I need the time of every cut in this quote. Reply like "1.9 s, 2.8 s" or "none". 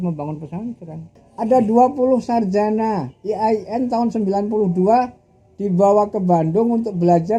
1.2 s